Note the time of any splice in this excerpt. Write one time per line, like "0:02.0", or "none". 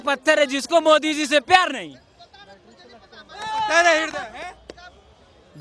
none